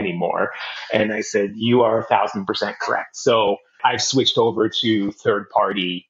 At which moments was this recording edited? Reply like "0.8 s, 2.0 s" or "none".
3.7 s